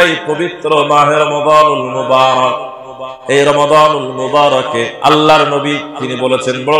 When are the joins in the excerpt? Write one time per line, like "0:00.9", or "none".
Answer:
0:04.9